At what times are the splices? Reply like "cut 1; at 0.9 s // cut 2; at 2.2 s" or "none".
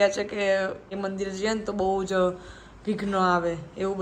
cut 1; at 0.9 s